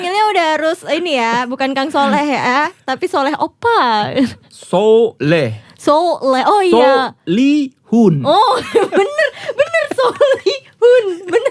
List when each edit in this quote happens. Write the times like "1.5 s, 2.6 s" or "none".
none